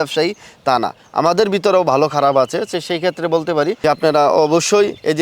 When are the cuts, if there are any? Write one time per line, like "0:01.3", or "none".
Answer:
0:03.8